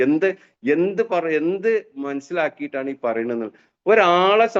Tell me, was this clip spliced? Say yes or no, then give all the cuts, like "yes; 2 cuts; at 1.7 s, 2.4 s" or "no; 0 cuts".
no; 0 cuts